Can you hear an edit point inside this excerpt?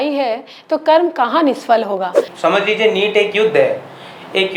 yes; 1 cut; at 2.3 s

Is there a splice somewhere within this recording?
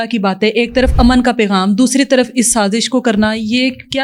no; 0 cuts

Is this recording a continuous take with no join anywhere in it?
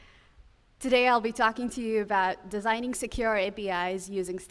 yes; 0 cuts

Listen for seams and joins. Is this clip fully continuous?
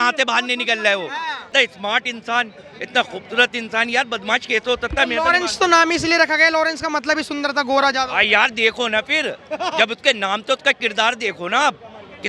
no; 1 cut; at 1.4 s

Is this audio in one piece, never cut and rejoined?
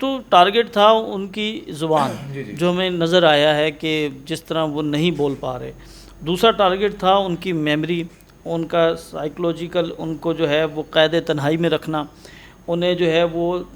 yes; 0 cuts

